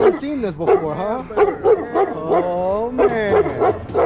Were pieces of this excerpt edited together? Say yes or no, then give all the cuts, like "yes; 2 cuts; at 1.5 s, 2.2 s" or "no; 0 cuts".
no; 0 cuts